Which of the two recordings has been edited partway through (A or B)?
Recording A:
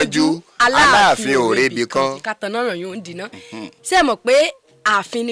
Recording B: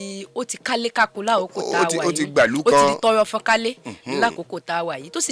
A